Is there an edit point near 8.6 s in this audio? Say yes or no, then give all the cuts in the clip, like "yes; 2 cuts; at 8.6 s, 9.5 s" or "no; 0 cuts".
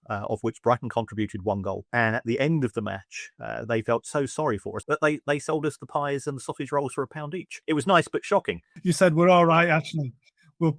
yes; 4 cuts; at 1.8 s, 4.7 s, 7.6 s, 8.6 s